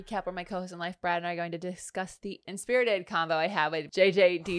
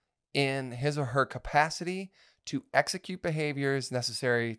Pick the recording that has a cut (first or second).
first